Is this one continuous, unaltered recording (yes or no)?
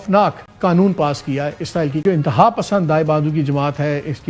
no